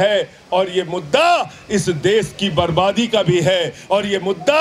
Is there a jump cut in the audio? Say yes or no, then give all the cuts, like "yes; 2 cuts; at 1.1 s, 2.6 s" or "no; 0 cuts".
no; 0 cuts